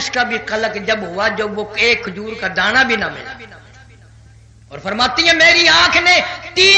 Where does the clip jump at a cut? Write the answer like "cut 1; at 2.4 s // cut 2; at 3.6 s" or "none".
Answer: none